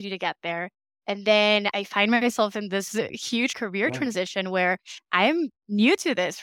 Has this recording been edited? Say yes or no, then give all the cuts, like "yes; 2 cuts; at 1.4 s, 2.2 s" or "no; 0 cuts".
yes; 2 cuts; at 1.7 s, 3.6 s